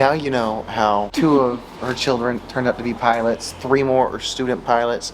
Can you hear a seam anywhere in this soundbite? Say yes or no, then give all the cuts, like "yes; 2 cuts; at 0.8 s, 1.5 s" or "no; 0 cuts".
yes; 1 cut; at 1.1 s